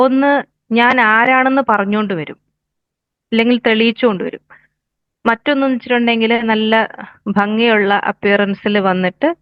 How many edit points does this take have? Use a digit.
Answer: 0